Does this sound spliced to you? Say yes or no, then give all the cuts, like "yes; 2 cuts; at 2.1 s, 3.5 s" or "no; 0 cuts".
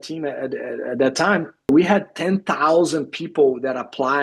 yes; 1 cut; at 1.7 s